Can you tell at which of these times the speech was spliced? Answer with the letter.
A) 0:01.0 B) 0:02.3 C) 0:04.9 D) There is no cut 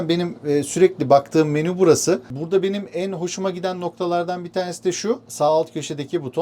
B